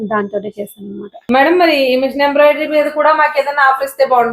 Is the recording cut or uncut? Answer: cut